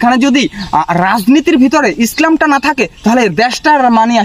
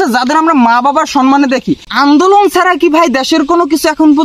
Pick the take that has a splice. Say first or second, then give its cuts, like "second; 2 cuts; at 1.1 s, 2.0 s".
second; 1 cut; at 1.8 s